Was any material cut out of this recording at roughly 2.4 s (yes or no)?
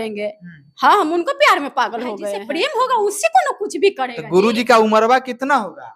yes